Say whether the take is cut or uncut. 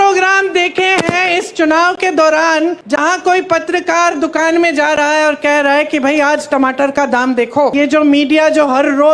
cut